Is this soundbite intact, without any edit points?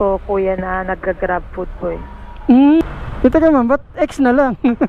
no; 1 cut; at 2.9 s

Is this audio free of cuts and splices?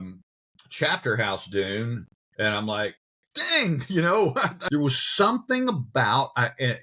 no; 1 cut; at 4.5 s

